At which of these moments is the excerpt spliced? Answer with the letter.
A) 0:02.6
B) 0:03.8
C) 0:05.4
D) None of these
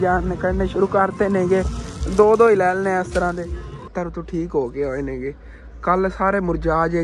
B